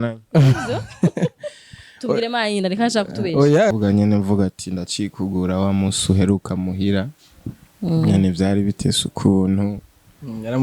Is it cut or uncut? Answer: cut